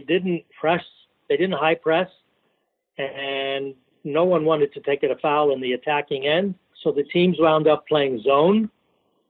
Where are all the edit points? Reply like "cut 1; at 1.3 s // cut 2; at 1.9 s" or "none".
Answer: cut 1; at 6.7 s